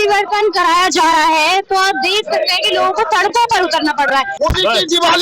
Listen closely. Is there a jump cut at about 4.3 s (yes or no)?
yes